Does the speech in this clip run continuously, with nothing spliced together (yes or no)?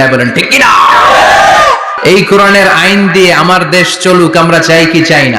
no